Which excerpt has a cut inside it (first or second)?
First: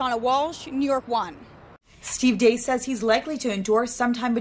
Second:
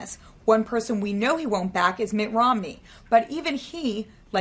first